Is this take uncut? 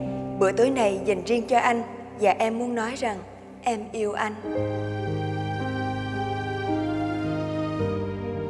yes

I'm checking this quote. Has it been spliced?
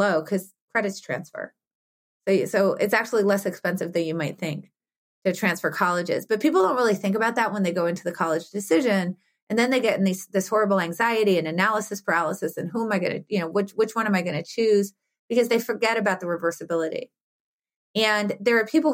no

